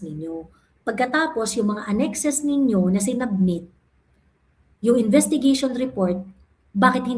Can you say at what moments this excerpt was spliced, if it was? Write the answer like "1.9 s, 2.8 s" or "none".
none